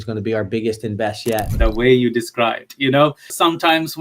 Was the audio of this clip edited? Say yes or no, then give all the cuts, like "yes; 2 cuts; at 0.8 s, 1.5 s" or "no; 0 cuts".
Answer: yes; 1 cut; at 1.5 s